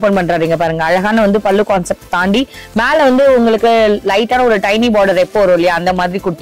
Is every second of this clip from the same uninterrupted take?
yes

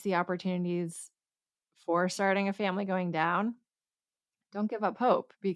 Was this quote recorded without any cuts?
yes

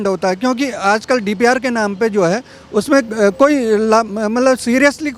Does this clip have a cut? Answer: no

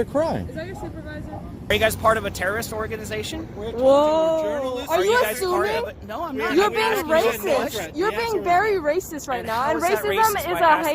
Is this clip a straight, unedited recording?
no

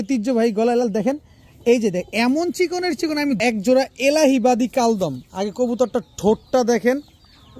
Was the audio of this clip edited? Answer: yes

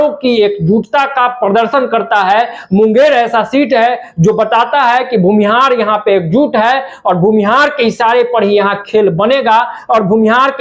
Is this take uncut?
yes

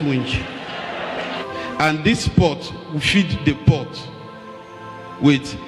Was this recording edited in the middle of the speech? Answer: yes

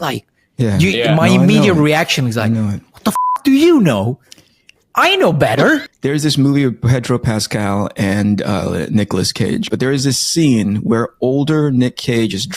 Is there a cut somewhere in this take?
yes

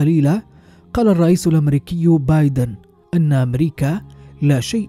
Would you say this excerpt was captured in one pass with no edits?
yes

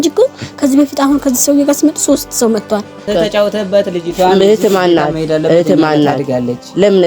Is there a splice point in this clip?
yes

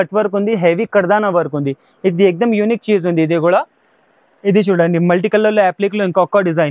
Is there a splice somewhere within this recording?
no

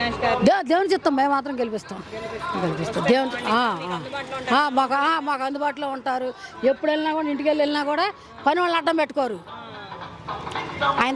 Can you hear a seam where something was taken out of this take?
no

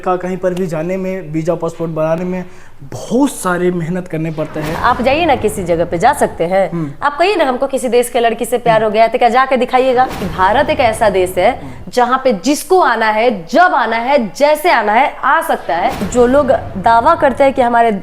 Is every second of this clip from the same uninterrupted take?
no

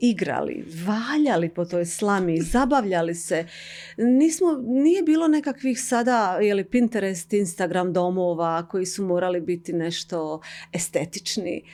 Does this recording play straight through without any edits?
yes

